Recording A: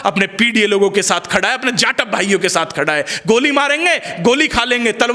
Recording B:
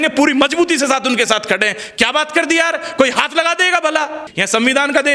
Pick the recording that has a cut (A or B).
B